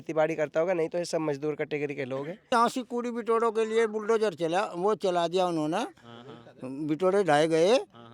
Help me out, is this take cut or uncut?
cut